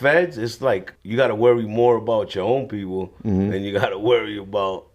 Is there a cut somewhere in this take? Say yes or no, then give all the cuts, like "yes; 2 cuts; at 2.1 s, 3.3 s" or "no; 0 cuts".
yes; 1 cut; at 1.0 s